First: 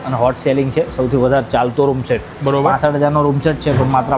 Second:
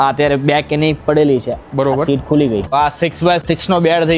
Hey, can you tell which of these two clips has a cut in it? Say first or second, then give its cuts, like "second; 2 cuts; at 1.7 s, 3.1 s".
second; 1 cut; at 3.1 s